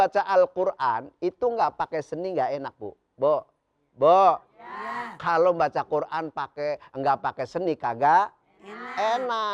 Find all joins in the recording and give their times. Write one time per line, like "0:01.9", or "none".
none